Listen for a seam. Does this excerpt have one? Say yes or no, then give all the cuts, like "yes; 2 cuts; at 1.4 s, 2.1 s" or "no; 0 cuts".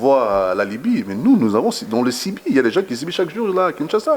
no; 0 cuts